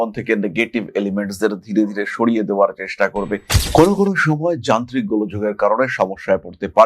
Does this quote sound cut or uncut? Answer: cut